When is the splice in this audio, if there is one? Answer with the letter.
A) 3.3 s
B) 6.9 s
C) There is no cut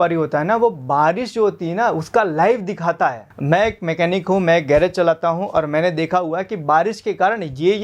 A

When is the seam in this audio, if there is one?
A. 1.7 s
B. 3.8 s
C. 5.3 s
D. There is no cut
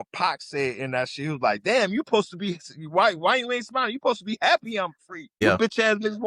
C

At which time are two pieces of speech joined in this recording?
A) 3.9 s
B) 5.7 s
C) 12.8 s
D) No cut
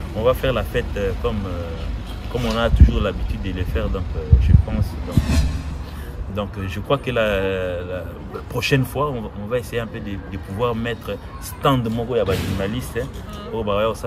B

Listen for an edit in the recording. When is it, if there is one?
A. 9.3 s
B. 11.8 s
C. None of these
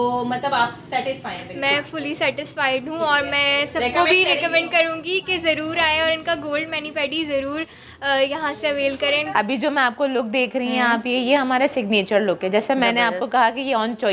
A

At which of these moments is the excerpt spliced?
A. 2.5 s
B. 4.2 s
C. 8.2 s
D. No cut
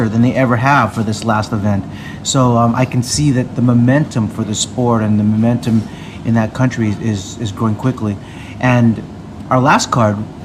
D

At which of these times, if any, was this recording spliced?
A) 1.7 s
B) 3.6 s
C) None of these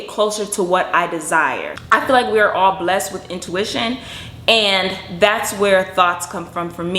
A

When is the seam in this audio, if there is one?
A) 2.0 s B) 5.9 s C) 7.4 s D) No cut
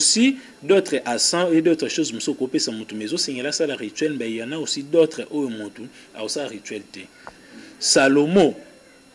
C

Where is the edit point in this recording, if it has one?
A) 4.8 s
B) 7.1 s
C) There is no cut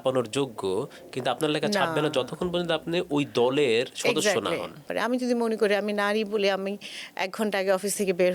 A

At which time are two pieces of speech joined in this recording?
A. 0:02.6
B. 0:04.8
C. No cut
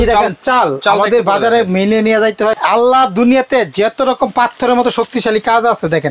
A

